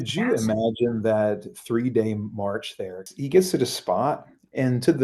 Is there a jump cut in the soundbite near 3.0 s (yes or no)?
yes